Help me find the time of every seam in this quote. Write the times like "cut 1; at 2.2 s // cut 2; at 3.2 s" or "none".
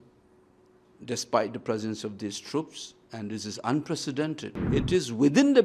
cut 1; at 4.5 s